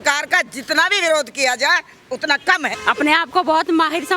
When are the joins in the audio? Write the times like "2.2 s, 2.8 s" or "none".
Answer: 2.7 s